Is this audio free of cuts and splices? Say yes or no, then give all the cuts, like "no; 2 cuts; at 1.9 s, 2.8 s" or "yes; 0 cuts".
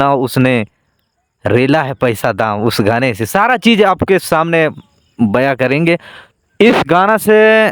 no; 1 cut; at 6.3 s